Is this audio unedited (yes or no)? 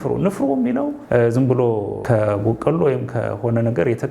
no